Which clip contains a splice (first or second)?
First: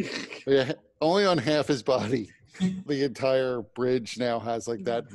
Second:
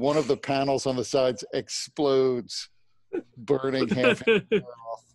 first